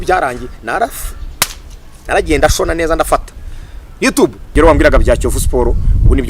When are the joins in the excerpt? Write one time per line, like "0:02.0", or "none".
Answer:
0:04.4